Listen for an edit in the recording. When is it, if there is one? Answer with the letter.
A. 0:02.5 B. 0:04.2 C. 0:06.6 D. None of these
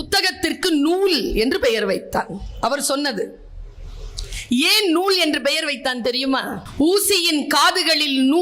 C